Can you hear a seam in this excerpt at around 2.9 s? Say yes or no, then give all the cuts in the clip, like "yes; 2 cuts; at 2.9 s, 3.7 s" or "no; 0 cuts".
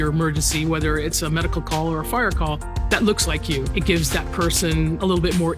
no; 0 cuts